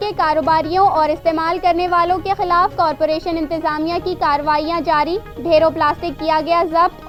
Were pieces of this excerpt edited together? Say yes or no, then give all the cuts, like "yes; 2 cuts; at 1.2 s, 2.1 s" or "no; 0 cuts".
no; 0 cuts